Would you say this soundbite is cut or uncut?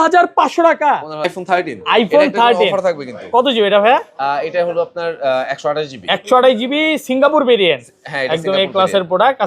cut